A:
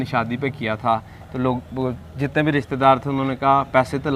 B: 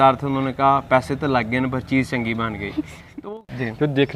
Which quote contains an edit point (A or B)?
B